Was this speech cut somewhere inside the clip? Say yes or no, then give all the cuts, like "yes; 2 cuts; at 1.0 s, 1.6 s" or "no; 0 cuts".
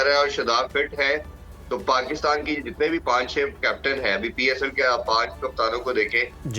no; 0 cuts